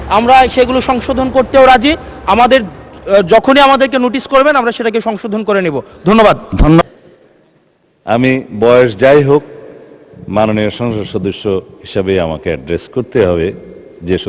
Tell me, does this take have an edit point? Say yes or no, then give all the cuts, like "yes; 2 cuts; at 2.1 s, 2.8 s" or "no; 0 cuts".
yes; 1 cut; at 6.8 s